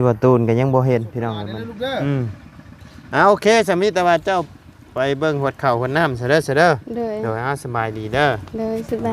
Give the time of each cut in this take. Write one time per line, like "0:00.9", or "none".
0:01.3